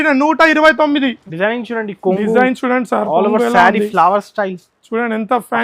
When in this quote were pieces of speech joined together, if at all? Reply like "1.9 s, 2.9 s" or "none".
1.2 s